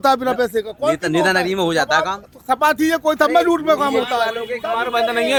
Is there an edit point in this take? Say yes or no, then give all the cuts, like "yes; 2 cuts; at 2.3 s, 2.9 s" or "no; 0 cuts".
no; 0 cuts